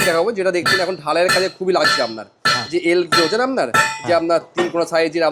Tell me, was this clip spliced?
no; 0 cuts

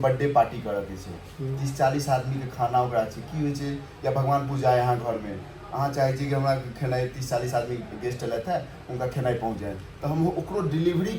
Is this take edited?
no; 0 cuts

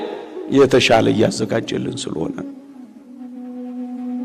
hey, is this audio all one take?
yes; 0 cuts

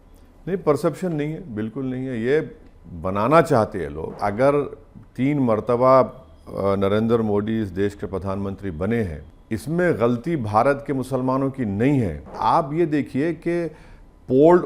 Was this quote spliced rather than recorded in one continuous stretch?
yes; 3 cuts; at 4.2 s, 9.3 s, 12.4 s

